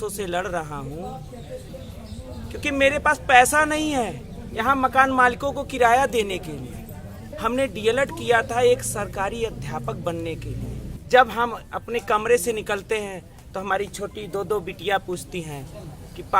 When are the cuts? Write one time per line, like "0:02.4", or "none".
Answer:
0:01.7
0:07.3
0:10.9